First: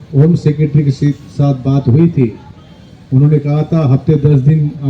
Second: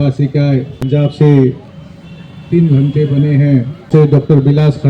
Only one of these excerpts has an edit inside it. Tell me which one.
second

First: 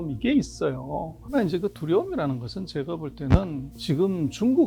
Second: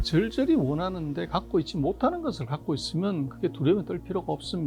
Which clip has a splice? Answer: first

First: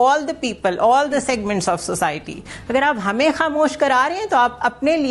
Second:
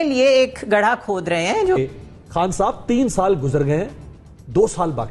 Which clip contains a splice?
second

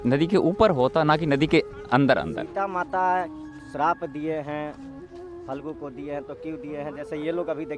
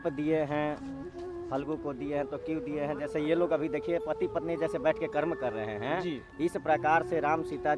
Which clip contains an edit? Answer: first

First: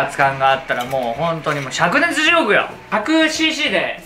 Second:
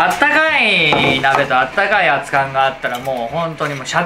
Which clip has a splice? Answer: first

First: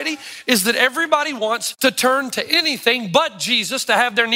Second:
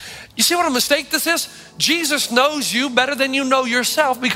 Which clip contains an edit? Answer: first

